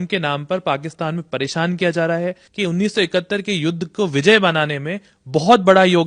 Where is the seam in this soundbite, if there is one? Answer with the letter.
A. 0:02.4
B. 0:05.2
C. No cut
A